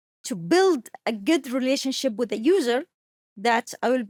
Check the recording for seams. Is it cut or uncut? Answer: uncut